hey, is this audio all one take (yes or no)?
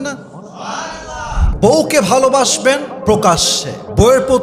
no